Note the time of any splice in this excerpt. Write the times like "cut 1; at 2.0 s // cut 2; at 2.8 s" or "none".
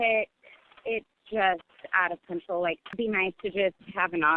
cut 1; at 2.9 s